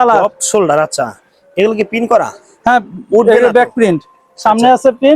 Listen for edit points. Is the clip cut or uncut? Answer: uncut